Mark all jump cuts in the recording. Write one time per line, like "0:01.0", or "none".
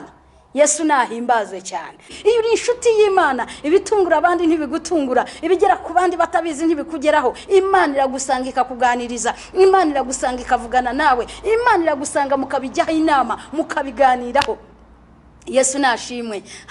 0:02.1